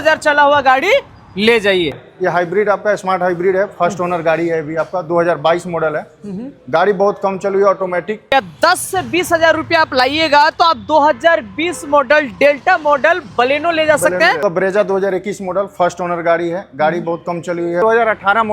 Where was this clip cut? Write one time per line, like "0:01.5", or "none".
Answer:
0:02.0
0:08.3
0:14.4
0:17.8